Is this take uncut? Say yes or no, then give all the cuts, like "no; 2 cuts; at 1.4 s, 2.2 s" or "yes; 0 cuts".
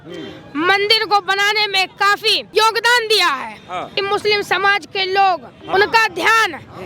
no; 3 cuts; at 2.5 s, 3.9 s, 5.5 s